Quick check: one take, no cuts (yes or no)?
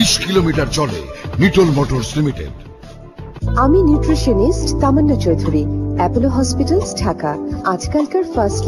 yes